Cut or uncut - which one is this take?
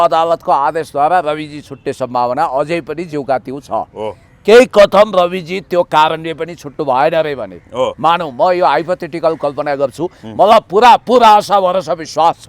uncut